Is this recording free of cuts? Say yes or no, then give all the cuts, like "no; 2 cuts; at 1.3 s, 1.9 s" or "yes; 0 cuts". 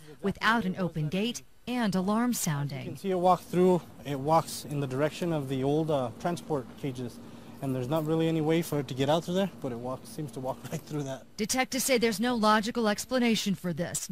yes; 0 cuts